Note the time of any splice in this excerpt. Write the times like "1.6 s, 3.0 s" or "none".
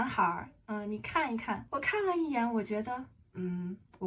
1.6 s